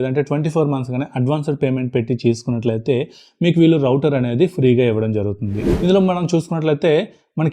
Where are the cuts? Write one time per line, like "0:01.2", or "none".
0:05.6